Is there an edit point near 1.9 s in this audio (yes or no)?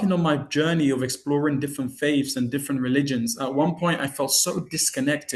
no